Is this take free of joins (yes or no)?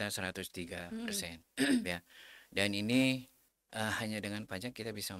no